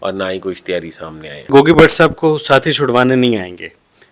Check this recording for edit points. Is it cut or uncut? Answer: cut